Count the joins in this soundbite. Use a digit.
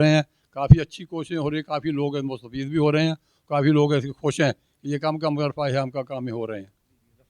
0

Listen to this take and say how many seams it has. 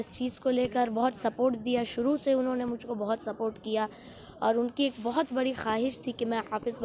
0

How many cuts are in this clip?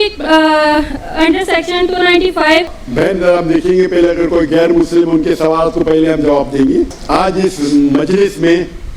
2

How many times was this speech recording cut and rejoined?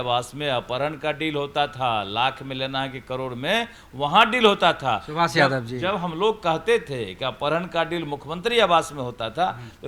0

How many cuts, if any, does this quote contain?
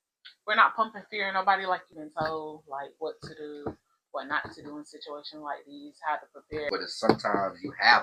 2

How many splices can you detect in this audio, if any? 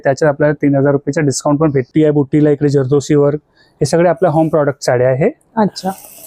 1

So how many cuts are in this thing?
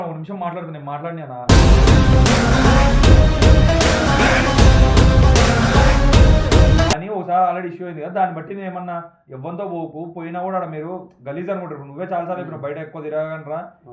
1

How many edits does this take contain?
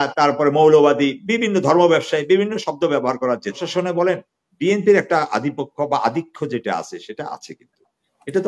1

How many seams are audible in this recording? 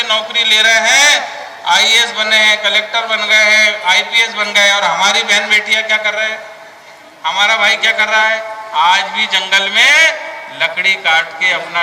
0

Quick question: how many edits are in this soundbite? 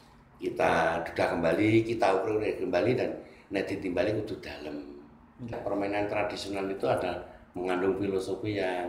1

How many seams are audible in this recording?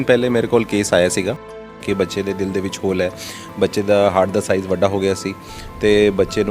1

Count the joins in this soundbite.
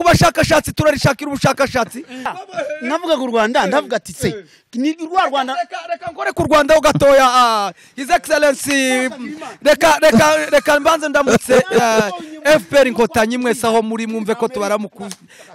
1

